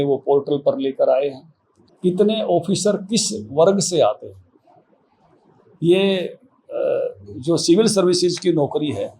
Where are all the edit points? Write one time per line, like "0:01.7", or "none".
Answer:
0:01.8